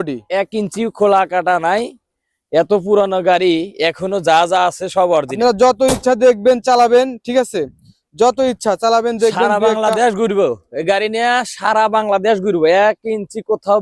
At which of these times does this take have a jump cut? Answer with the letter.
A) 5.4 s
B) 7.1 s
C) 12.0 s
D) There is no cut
A